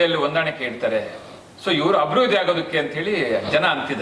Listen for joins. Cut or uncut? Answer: uncut